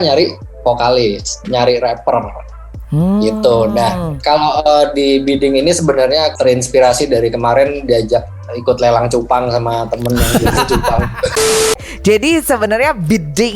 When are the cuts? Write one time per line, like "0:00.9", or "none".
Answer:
0:06.3
0:11.7